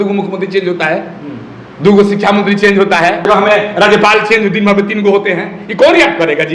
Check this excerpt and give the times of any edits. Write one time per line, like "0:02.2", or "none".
0:03.3